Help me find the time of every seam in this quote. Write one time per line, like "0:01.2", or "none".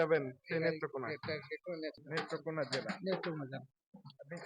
0:02.0